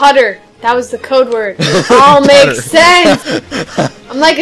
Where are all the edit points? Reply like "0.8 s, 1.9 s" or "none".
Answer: 3.2 s